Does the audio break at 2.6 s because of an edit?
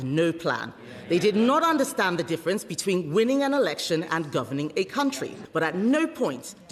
no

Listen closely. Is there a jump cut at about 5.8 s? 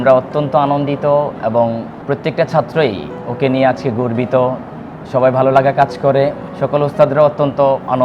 no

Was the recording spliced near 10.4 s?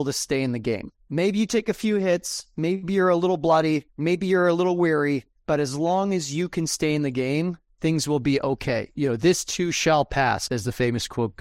yes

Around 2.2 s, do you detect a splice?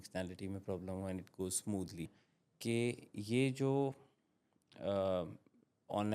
yes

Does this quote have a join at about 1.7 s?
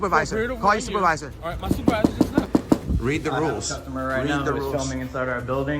yes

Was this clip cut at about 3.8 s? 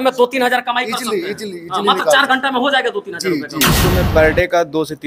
yes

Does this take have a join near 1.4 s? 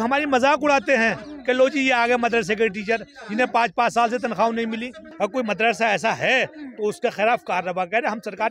no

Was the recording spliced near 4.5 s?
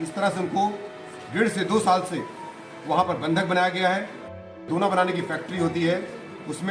yes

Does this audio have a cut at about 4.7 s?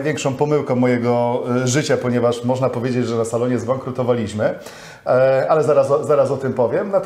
no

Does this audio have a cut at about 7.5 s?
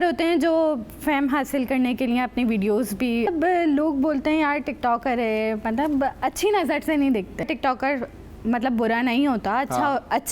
yes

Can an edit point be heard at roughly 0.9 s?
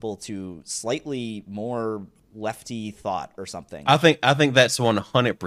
no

